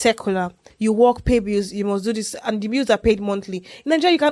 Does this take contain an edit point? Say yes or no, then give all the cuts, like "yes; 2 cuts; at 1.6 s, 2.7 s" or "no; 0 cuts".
no; 0 cuts